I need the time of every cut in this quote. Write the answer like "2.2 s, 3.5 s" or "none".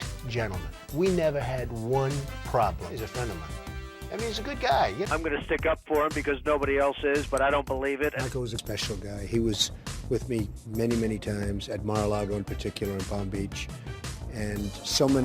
5.1 s, 8.6 s